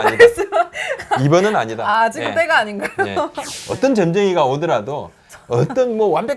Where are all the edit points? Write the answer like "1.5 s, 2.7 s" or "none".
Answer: 3.5 s